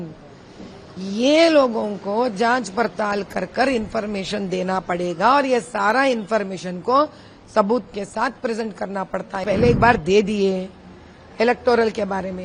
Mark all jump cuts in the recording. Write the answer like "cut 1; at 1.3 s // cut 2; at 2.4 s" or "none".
cut 1; at 9.4 s